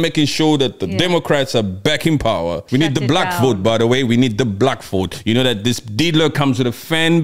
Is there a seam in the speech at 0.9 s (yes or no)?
no